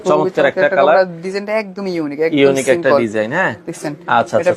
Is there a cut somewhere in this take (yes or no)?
no